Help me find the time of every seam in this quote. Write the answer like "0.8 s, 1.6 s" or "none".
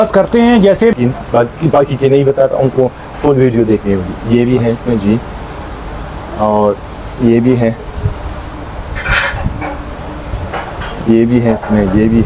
0.9 s

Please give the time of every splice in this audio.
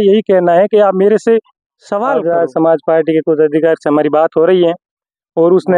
2.1 s

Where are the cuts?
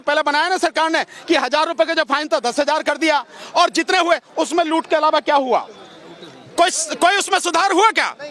none

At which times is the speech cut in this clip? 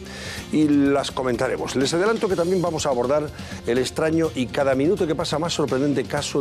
2.5 s

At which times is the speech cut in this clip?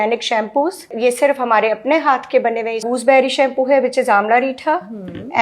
0.9 s, 2.8 s

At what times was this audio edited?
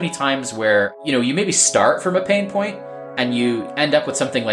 1.0 s, 3.7 s

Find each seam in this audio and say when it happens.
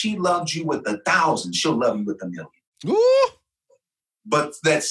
none

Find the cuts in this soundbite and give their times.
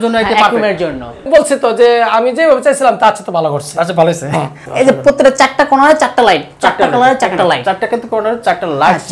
1.3 s, 4.6 s

